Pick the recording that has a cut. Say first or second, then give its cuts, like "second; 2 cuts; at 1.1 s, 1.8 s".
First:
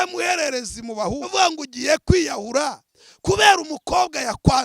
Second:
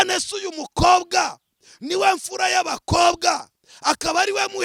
first; 1 cut; at 1.3 s